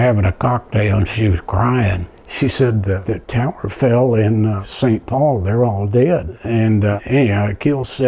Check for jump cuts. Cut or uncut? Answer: cut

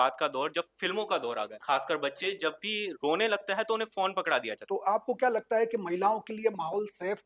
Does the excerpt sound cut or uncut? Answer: cut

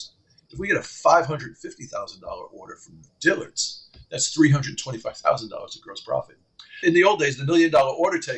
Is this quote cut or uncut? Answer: cut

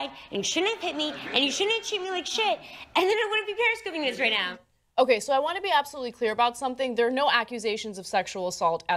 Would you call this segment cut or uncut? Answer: cut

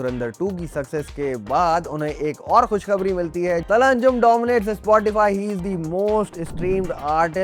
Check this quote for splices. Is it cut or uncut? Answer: cut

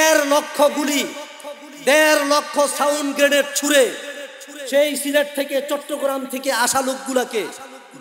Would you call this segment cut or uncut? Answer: uncut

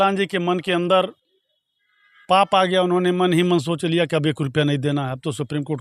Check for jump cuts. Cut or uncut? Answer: uncut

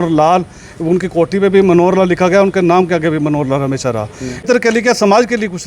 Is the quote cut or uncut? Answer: cut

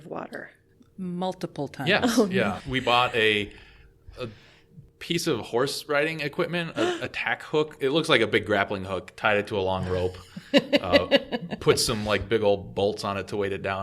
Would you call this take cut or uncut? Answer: cut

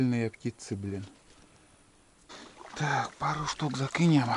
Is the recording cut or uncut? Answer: cut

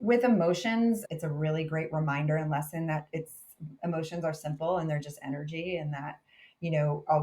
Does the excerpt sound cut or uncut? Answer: cut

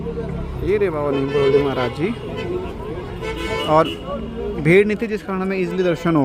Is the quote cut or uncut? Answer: uncut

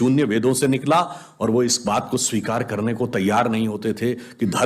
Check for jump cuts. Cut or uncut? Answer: uncut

